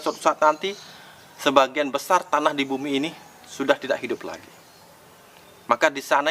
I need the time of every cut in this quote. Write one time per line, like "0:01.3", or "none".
none